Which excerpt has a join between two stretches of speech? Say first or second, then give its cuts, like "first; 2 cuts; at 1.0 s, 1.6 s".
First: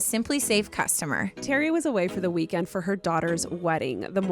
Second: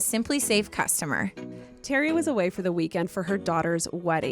first; 1 cut; at 1.4 s